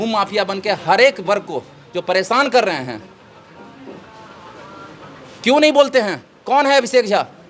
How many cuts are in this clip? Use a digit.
0